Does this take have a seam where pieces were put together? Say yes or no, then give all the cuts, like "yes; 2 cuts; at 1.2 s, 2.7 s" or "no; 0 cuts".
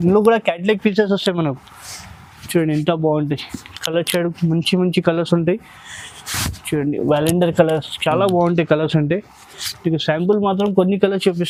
no; 0 cuts